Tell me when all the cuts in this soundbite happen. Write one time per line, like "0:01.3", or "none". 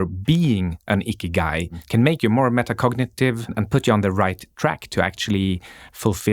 0:01.8
0:03.6